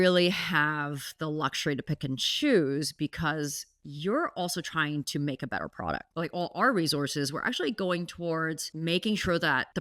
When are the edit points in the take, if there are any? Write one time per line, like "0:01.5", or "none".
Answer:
none